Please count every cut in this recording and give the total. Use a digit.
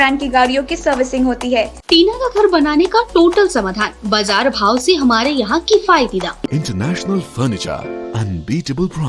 2